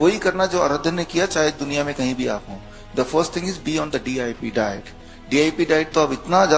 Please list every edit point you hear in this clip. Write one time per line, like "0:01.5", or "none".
none